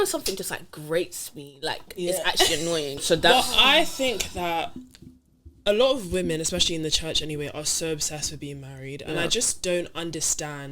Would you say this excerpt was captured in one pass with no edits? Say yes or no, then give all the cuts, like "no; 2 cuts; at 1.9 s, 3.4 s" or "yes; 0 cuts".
no; 1 cut; at 3.0 s